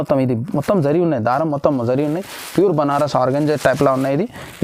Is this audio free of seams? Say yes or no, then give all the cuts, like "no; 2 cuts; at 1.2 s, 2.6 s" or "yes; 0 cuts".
yes; 0 cuts